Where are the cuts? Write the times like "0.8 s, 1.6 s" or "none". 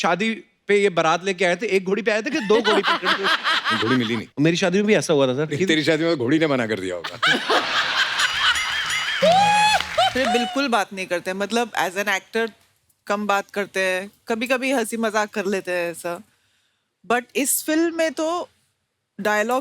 4.0 s, 5.6 s, 10.1 s